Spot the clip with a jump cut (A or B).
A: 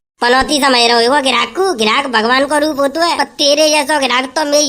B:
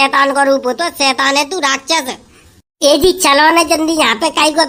A